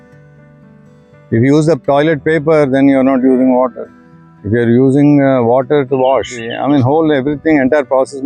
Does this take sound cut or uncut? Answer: cut